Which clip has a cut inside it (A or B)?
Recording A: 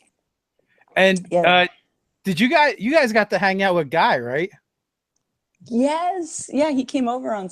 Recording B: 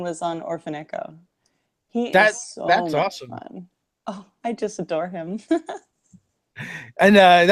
A